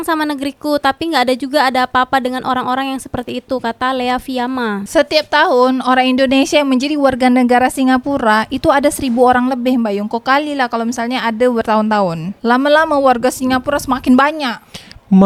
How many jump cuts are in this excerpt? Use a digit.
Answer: 0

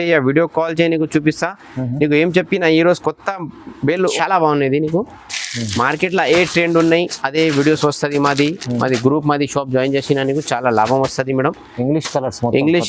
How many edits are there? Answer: 1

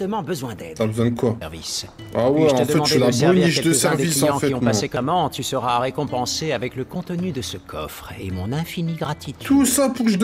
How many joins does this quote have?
2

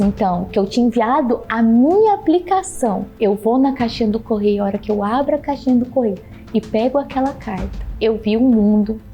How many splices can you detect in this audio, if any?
2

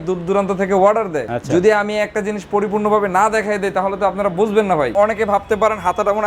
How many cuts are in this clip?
1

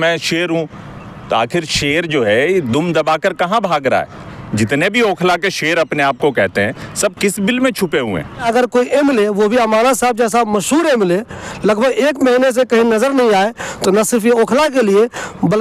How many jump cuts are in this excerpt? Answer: 2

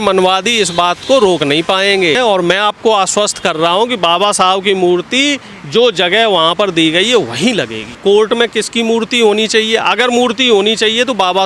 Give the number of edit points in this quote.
2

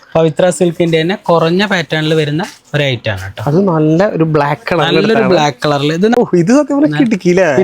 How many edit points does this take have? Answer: 1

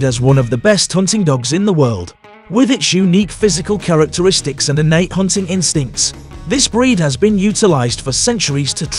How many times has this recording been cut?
0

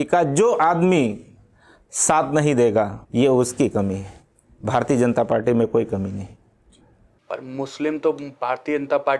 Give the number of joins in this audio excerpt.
1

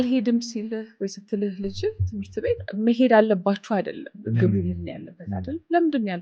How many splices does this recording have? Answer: 2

